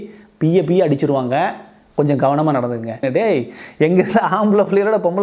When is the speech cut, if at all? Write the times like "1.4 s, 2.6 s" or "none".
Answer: 3.0 s